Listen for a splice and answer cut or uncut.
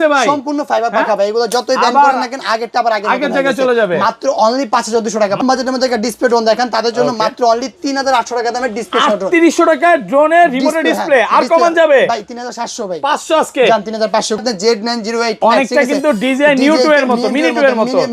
cut